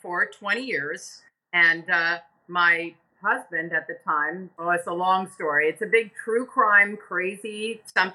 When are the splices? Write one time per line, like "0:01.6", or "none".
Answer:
0:04.5